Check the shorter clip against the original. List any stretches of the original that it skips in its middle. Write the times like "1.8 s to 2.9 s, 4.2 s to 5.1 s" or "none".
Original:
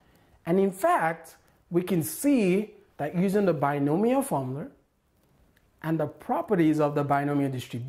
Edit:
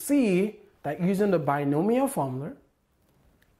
none